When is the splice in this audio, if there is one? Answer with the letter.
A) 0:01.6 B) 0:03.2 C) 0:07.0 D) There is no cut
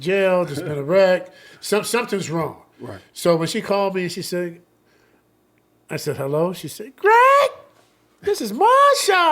D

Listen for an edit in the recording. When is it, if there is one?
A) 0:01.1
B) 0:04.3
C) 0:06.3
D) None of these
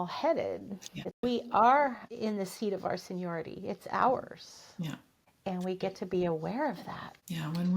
A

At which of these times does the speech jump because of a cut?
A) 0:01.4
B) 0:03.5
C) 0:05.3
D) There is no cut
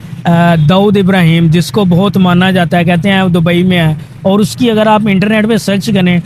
D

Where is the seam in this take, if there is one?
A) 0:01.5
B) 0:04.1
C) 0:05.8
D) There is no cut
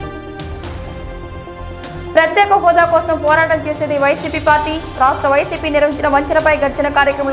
A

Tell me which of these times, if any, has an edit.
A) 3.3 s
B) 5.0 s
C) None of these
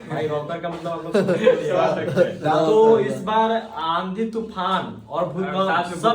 C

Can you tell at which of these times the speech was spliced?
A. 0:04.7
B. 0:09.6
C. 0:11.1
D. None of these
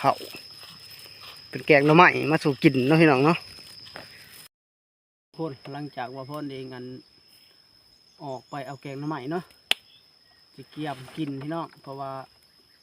A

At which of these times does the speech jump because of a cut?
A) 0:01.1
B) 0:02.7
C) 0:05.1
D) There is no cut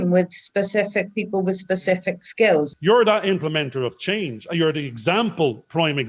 B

